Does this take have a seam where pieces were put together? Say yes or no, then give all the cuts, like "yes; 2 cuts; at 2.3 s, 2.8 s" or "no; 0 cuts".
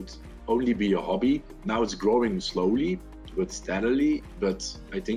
yes; 1 cut; at 1.6 s